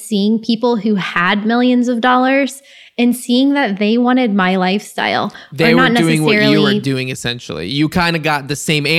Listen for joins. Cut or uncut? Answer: uncut